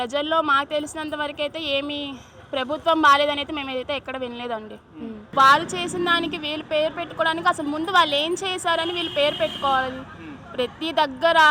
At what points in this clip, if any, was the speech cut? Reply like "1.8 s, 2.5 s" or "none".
5.3 s